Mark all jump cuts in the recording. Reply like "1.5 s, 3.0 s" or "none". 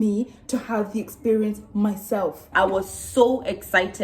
2.5 s